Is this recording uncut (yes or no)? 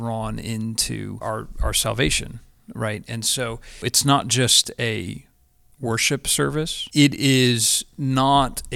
no